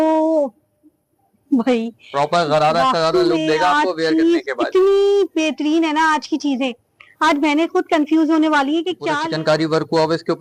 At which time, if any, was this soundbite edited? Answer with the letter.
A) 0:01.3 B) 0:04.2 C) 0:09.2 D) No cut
C